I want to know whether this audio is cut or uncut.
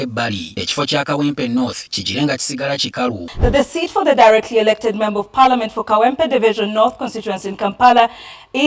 cut